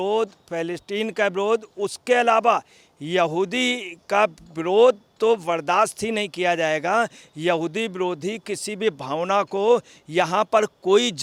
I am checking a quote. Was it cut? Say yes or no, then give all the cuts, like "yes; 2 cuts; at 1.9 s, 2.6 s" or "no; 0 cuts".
no; 0 cuts